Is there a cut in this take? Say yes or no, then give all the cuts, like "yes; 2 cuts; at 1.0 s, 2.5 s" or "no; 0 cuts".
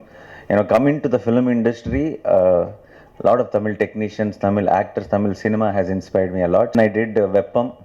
yes; 1 cut; at 6.7 s